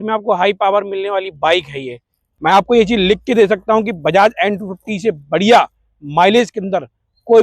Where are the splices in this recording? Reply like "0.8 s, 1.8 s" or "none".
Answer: 2.3 s